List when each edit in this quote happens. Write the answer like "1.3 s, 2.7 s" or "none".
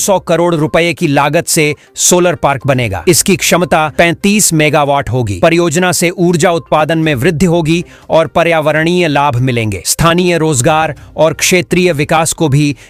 none